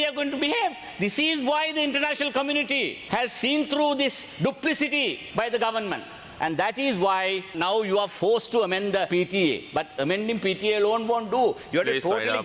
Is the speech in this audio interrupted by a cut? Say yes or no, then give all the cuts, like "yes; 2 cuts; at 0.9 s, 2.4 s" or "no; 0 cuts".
yes; 4 cuts; at 3.0 s, 5.2 s, 7.5 s, 9.1 s